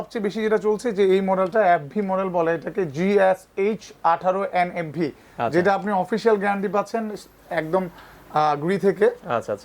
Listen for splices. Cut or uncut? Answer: uncut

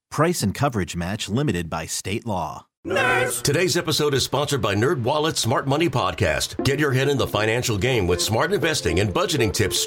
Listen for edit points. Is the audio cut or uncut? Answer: cut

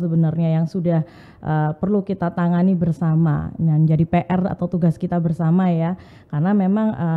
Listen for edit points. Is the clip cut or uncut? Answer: uncut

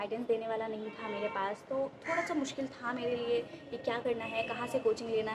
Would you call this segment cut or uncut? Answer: uncut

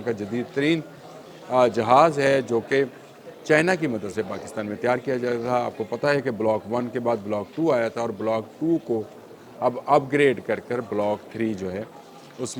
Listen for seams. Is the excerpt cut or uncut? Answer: uncut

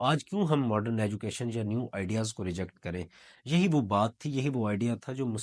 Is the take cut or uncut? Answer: uncut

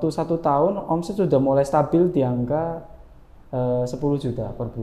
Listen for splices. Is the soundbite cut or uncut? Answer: uncut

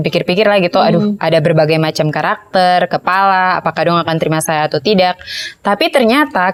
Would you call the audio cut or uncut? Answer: uncut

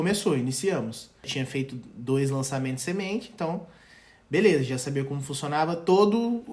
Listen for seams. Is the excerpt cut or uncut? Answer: cut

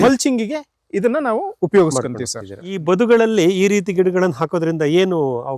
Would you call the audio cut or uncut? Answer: cut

